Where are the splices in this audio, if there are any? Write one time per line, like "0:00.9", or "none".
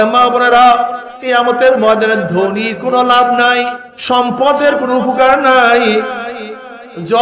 0:01.1
0:03.9

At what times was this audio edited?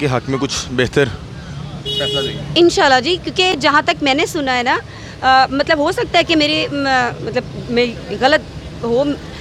none

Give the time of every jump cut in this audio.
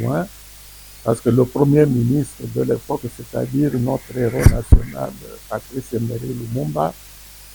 none

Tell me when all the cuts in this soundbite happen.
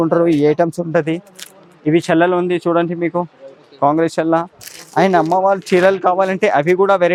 none

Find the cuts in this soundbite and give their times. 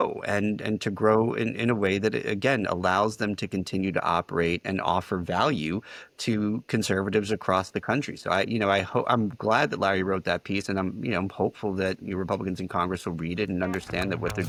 none

